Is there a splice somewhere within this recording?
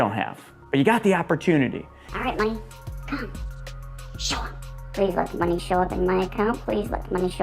yes; 1 cut; at 2.0 s

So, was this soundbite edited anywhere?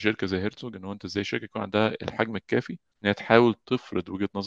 yes; 1 cut; at 2.8 s

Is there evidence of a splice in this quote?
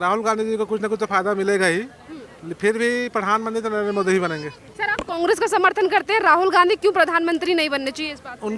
no; 0 cuts

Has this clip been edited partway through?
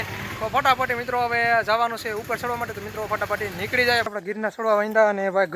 yes; 1 cut; at 4.1 s

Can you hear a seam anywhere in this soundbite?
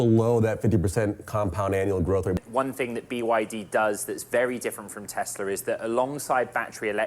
yes; 1 cut; at 2.4 s

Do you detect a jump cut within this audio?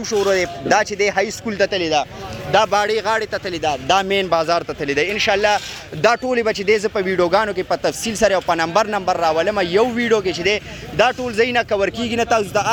no; 0 cuts

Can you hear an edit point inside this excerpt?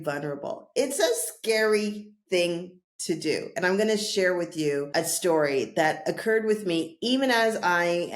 yes; 1 cut; at 4.9 s

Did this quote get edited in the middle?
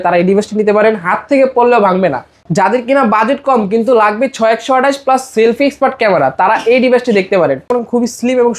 yes; 2 cuts; at 2.4 s, 7.7 s

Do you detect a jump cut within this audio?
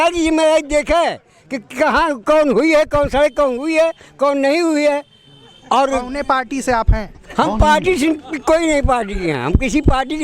no; 0 cuts

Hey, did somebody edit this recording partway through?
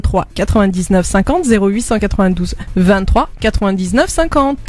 no; 0 cuts

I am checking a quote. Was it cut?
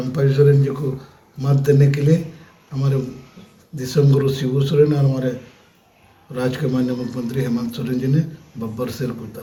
no; 0 cuts

